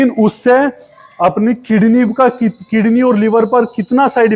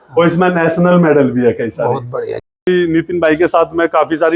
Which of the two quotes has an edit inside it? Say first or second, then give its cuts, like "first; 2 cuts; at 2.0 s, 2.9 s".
second; 1 cut; at 2.6 s